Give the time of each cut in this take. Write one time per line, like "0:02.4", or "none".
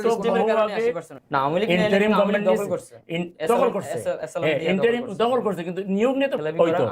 0:01.1